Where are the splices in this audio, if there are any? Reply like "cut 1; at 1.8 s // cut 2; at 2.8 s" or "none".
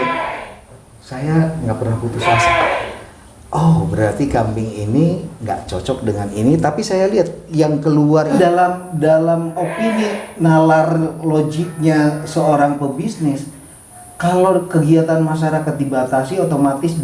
cut 1; at 8.3 s